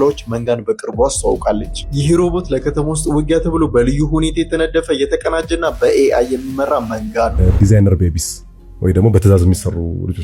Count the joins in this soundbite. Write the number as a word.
one